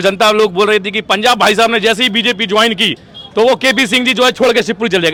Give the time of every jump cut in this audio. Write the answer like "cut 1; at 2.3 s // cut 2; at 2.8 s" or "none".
none